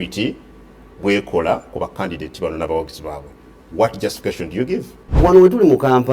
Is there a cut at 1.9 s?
no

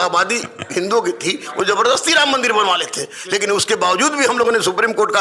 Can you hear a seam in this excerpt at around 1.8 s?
no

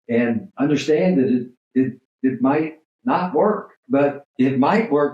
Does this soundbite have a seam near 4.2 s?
yes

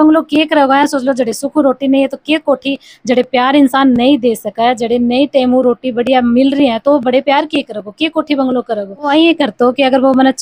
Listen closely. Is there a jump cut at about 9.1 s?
yes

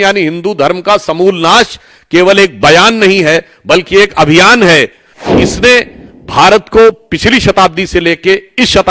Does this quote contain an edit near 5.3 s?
yes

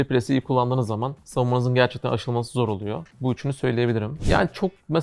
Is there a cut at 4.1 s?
yes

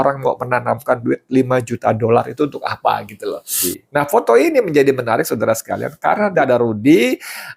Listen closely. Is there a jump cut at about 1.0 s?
no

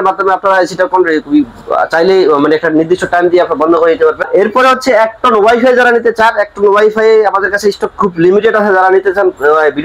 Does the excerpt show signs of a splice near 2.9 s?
no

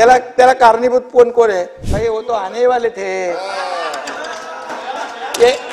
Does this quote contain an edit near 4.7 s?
no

